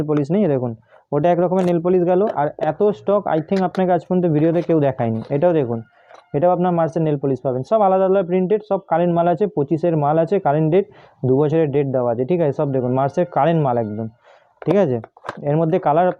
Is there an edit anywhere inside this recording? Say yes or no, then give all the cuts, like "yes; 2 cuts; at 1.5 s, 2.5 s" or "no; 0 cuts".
no; 0 cuts